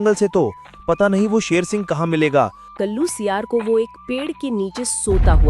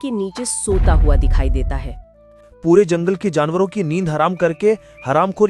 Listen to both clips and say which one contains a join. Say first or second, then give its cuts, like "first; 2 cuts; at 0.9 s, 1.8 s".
first; 1 cut; at 2.7 s